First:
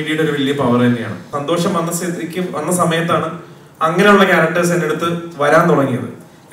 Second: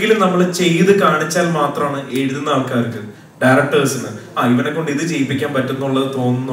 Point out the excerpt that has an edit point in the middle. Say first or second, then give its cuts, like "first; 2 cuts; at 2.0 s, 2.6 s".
first; 1 cut; at 1.3 s